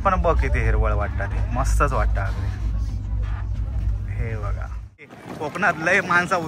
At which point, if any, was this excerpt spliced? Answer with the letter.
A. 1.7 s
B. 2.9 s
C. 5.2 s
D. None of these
C